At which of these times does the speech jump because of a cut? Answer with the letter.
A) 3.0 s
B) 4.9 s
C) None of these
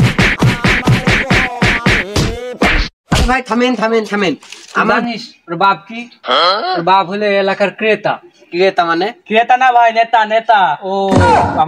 B